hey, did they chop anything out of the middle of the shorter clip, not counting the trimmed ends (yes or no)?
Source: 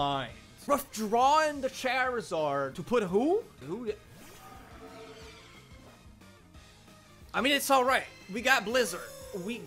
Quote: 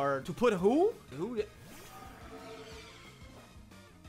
no